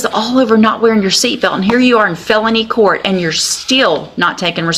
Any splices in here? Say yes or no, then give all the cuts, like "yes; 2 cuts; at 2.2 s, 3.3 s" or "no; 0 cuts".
no; 0 cuts